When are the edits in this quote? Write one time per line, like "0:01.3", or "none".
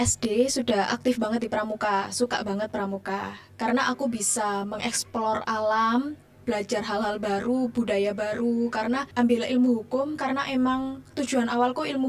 0:09.1